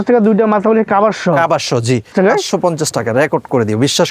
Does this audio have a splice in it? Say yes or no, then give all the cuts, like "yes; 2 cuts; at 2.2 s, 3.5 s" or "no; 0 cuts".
no; 0 cuts